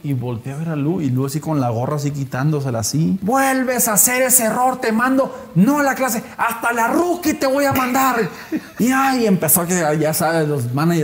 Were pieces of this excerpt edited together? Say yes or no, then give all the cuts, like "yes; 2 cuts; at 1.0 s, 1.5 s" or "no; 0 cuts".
yes; 2 cuts; at 3.2 s, 8.7 s